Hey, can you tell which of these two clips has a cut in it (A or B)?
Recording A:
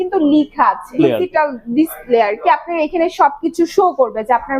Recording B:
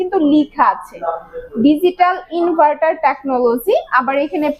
A